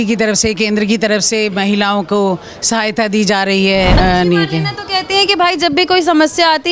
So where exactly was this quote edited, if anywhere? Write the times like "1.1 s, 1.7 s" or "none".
4.0 s